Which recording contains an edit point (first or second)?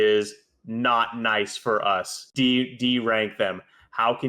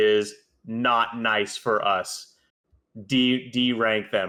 first